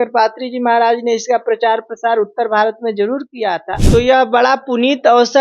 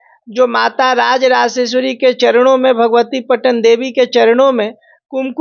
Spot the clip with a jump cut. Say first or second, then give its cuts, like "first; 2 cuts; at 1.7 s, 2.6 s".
first; 1 cut; at 3.7 s